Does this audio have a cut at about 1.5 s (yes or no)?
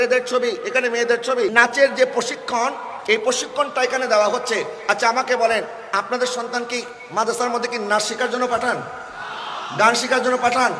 yes